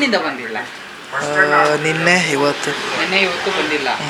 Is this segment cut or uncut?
uncut